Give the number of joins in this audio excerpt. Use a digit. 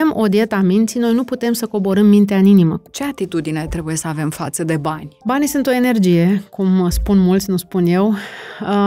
2